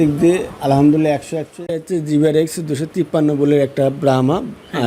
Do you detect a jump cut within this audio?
yes; 1 cut; at 1.7 s

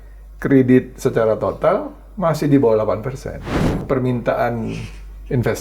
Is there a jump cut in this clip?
yes; 1 cut; at 3.7 s

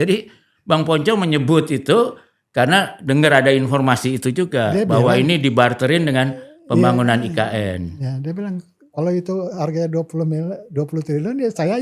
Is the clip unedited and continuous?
yes; 0 cuts

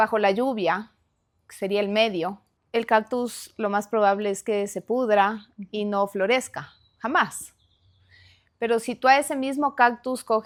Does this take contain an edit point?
no; 0 cuts

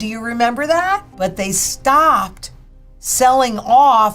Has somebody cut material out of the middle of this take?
yes; 1 cut; at 1.1 s

